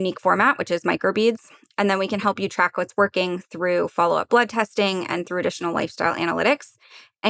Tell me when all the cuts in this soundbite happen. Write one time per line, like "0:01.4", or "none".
none